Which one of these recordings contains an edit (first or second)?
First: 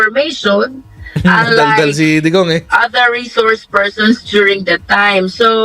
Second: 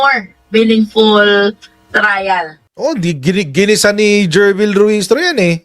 second